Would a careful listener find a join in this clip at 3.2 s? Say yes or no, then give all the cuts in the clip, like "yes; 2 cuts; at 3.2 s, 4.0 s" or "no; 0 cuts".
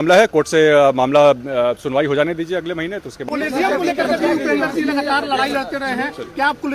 yes; 1 cut; at 3.2 s